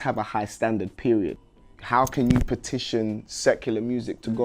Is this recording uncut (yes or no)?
no